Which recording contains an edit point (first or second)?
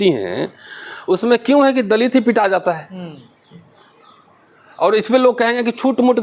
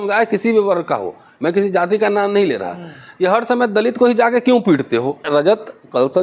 second